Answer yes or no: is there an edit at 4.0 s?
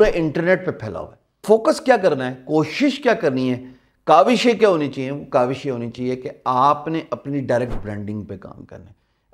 no